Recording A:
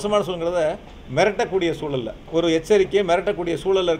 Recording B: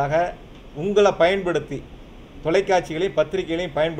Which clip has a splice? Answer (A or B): A